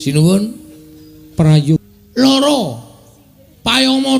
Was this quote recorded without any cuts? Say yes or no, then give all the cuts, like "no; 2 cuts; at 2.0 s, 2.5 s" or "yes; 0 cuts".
no; 1 cut; at 1.9 s